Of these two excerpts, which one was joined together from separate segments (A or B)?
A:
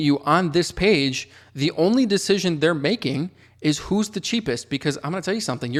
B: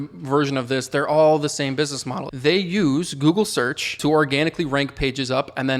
B